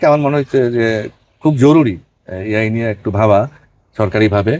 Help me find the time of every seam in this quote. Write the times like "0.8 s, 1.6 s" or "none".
none